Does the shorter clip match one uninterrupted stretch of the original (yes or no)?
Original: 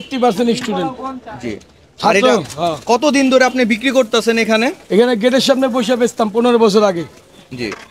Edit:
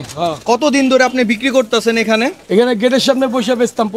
yes